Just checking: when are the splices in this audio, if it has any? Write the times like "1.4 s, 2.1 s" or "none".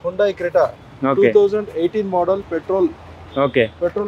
none